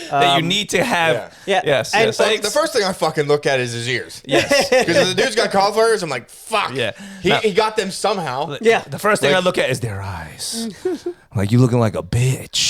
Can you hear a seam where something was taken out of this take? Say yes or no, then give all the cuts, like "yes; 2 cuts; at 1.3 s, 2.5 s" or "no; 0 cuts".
yes; 1 cut; at 2.1 s